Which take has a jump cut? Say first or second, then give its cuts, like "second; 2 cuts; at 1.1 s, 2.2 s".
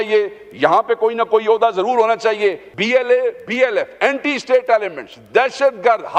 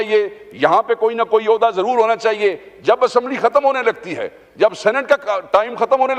first; 1 cut; at 2.7 s